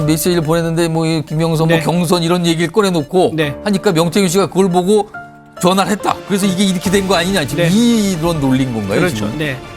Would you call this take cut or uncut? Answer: uncut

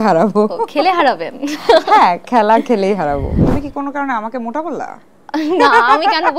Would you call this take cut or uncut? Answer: cut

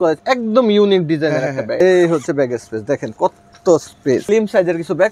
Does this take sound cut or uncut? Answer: cut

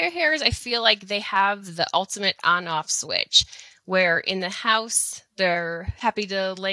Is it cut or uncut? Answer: uncut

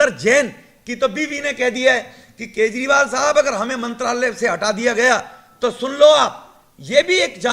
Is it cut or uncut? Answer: uncut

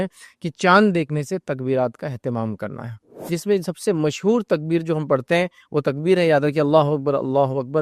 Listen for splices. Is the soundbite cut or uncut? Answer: cut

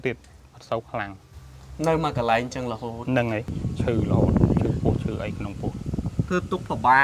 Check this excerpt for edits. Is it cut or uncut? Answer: cut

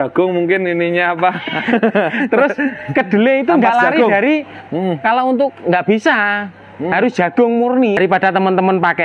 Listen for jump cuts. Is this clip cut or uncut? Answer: cut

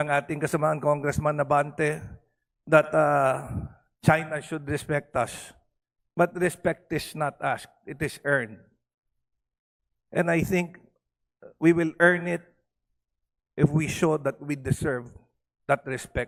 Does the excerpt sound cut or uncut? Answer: uncut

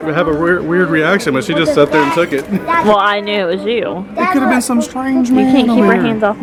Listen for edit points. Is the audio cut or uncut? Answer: uncut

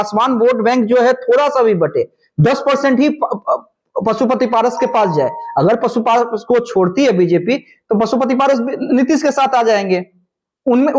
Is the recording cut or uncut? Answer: uncut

